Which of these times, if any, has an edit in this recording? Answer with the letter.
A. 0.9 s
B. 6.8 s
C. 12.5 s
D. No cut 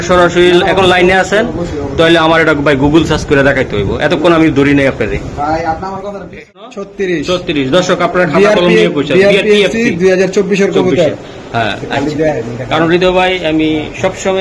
B